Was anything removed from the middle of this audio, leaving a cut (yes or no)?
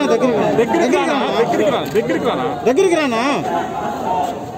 no